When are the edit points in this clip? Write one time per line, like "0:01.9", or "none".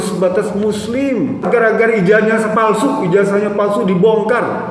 0:01.5